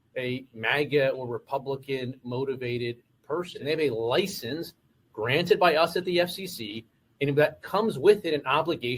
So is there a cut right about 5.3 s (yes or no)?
no